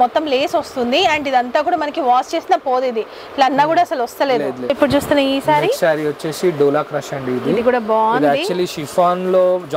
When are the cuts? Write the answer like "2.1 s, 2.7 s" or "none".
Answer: 4.6 s